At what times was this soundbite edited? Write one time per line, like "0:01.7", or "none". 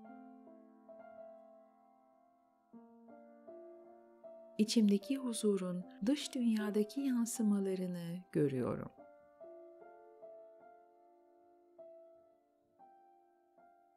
0:04.5
0:09.4